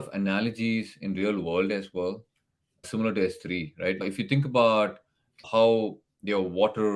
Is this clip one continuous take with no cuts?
no; 3 cuts; at 2.9 s, 4.0 s, 5.4 s

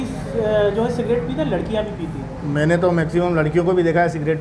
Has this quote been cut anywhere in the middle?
no; 0 cuts

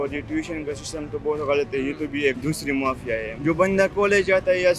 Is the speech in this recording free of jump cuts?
no; 2 cuts; at 2.4 s, 3.3 s

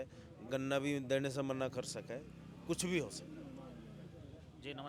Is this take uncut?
yes; 0 cuts

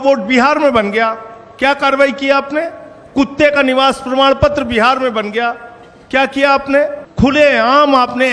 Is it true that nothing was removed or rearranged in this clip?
no; 1 cut; at 7.0 s

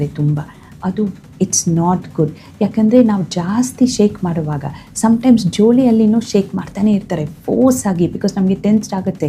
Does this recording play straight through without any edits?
yes; 0 cuts

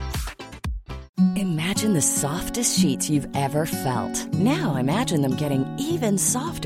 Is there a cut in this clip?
yes; 1 cut; at 0.9 s

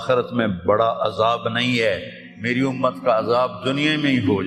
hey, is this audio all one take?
yes; 0 cuts

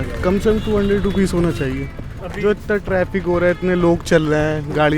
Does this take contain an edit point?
yes; 1 cut; at 1.9 s

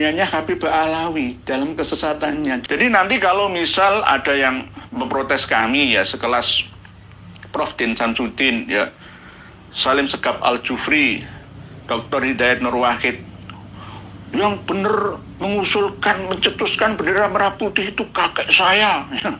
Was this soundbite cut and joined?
yes; 1 cut; at 2.6 s

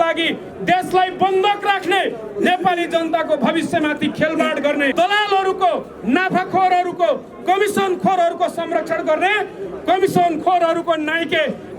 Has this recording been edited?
yes; 1 cut; at 4.9 s

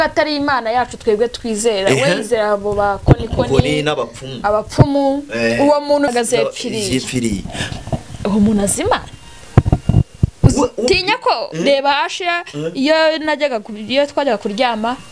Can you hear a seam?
yes; 1 cut; at 6.1 s

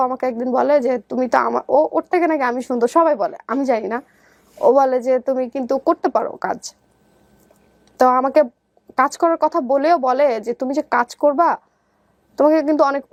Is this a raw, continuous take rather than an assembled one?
yes; 0 cuts

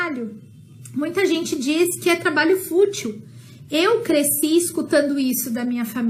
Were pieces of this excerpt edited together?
no; 0 cuts

